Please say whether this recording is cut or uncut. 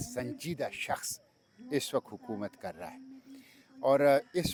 uncut